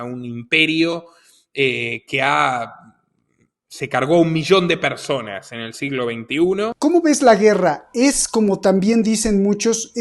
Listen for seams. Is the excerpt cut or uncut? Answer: cut